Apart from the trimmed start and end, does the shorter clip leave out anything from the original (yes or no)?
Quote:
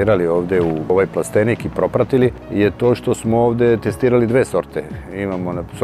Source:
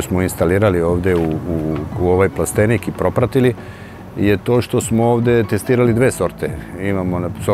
yes